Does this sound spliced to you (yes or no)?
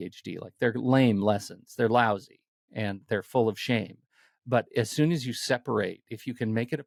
no